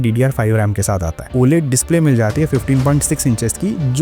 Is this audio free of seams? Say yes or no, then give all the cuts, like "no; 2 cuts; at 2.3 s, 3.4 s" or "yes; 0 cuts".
no; 1 cut; at 1.3 s